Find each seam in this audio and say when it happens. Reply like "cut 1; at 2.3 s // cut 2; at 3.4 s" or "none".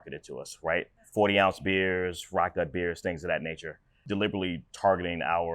cut 1; at 1.0 s // cut 2; at 4.0 s